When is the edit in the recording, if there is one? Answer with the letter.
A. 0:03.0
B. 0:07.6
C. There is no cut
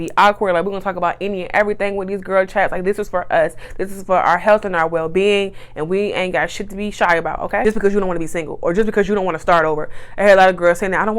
B